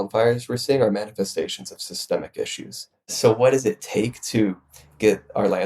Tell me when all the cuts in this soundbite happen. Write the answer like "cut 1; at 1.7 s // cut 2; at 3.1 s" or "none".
cut 1; at 3.1 s